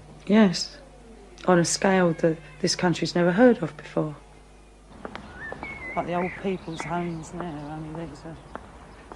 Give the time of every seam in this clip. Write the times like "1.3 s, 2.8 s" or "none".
7.3 s